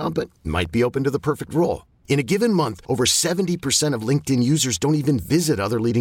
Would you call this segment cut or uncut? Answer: uncut